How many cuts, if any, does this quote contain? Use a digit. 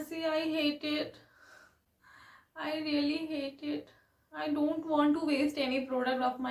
0